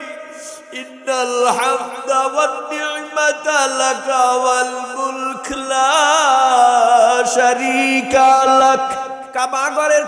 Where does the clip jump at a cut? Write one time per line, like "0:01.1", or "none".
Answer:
0:09.2